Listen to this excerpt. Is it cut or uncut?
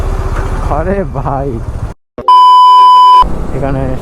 cut